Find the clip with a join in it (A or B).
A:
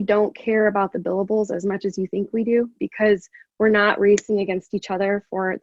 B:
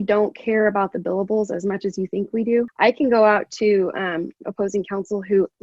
B